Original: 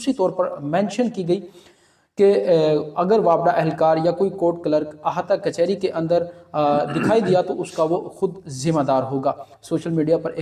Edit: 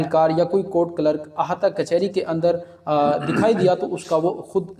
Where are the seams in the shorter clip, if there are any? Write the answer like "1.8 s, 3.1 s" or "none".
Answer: none